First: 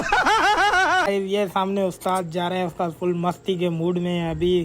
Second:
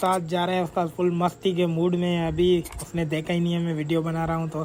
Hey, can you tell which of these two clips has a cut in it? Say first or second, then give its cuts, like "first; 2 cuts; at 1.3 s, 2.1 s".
first; 1 cut; at 1.1 s